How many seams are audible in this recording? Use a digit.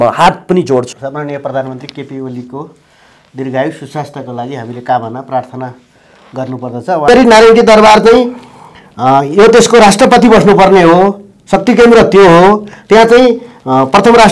2